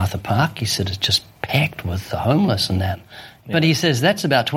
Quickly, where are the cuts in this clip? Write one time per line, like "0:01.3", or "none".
0:03.3